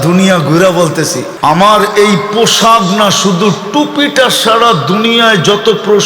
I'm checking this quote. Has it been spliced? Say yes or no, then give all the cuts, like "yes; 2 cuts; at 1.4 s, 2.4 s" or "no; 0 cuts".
yes; 1 cut; at 1.3 s